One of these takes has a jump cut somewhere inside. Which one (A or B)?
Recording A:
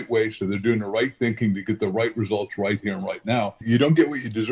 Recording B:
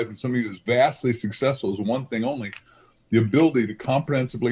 A